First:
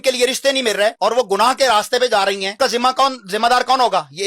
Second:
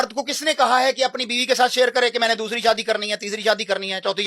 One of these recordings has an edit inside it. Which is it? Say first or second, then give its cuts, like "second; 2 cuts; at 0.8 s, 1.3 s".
first; 2 cuts; at 1.0 s, 2.5 s